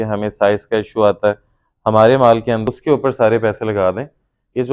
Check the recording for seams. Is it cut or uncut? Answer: cut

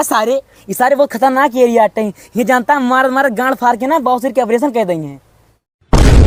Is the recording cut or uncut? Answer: uncut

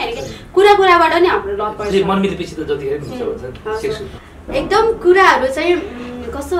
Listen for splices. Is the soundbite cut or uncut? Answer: cut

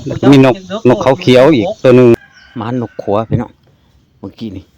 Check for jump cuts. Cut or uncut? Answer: cut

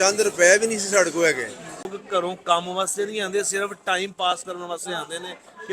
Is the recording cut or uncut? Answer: cut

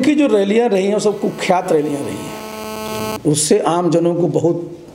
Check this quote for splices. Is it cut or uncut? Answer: uncut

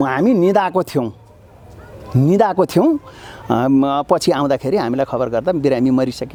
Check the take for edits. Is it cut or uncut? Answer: uncut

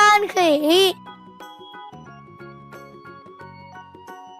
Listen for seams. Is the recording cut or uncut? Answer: cut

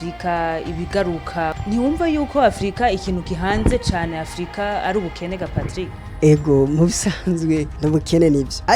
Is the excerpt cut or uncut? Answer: uncut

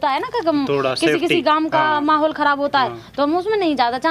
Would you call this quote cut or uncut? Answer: uncut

